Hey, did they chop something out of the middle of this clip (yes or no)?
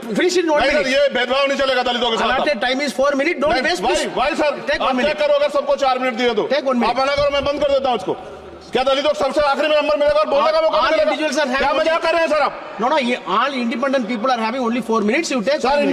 no